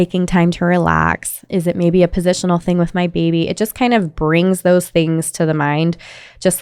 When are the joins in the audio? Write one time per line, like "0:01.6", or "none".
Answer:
0:01.4